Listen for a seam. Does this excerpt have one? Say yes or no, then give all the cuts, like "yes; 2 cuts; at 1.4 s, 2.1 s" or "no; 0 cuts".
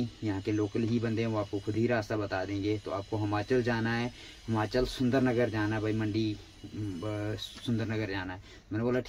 no; 0 cuts